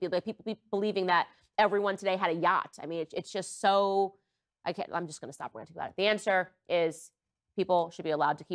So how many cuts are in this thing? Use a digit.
0